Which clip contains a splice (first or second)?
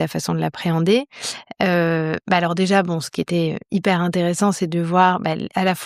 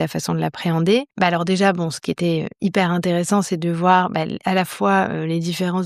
second